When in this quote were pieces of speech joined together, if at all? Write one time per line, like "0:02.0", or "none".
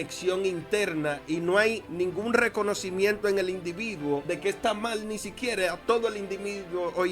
0:01.9
0:04.2